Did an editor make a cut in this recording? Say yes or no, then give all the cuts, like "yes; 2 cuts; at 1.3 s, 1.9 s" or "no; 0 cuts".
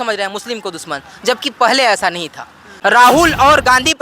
yes; 1 cut; at 2.7 s